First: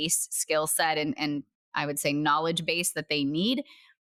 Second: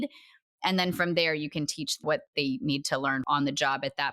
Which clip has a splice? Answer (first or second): second